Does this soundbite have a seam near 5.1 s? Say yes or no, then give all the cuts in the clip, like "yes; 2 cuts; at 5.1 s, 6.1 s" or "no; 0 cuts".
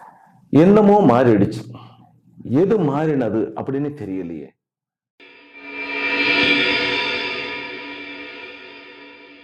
yes; 1 cut; at 5.1 s